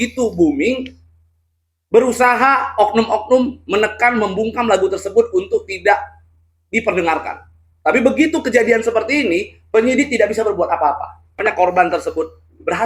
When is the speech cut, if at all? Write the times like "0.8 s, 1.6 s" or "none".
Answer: 11.4 s